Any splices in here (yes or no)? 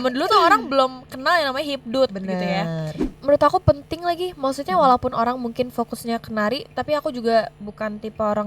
yes